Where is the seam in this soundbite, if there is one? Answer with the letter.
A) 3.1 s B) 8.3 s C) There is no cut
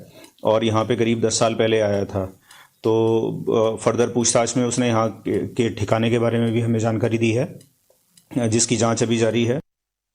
A